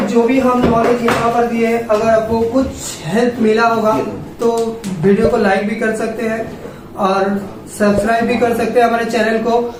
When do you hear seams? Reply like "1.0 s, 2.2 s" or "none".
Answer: none